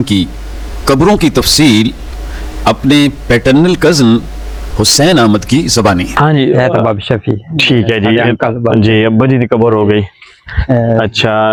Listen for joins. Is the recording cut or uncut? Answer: uncut